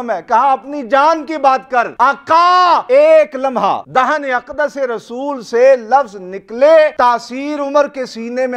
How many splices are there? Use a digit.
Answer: 4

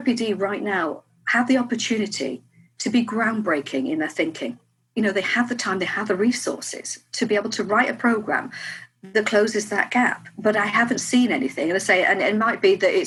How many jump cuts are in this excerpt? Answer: 0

